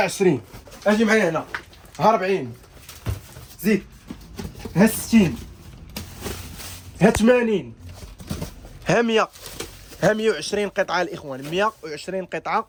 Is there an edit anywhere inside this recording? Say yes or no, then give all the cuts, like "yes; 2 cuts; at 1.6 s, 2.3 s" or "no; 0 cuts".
no; 0 cuts